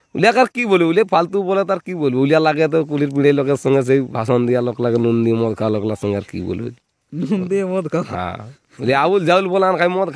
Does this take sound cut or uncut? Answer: uncut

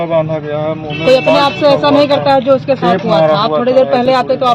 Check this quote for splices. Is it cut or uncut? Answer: uncut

